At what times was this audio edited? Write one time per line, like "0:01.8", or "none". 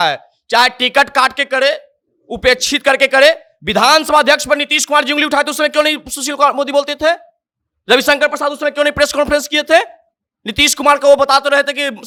none